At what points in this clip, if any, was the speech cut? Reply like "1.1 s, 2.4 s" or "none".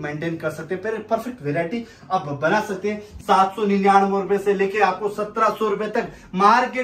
3.1 s